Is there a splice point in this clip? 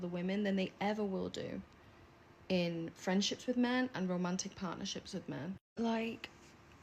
yes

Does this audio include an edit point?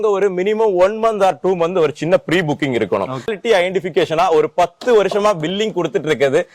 yes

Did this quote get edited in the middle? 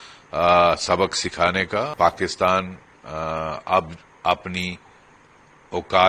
yes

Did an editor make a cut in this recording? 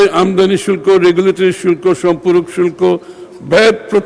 no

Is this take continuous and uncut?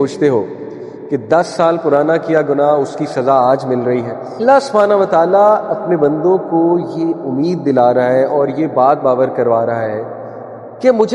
no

